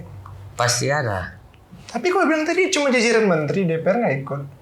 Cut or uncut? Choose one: uncut